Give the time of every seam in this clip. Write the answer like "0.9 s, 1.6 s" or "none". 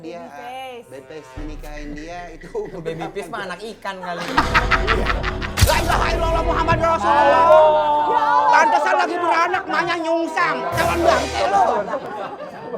5.6 s